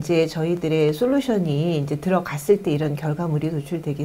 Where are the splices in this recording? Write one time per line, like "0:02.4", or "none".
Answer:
none